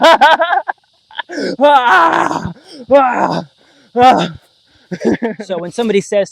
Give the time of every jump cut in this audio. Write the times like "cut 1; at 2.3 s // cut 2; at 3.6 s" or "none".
cut 1; at 5.4 s